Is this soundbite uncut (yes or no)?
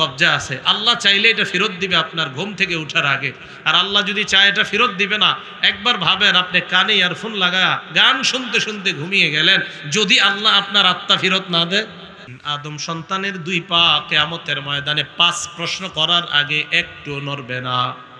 no